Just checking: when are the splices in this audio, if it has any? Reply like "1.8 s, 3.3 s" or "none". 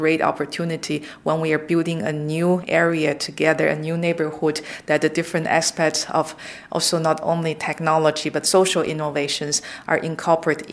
none